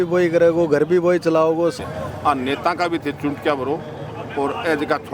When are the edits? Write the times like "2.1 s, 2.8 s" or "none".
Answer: 1.8 s